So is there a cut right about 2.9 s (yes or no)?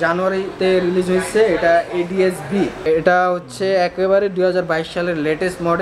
yes